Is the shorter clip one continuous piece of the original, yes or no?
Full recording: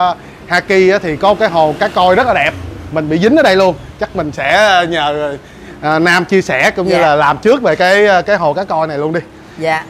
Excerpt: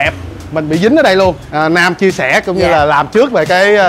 no